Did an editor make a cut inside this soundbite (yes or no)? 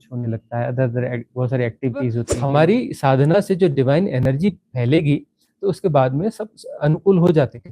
yes